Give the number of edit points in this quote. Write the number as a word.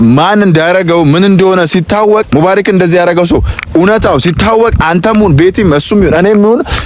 one